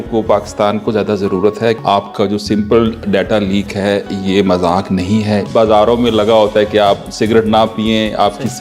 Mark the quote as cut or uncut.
cut